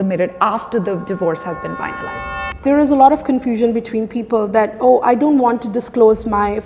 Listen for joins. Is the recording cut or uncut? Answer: cut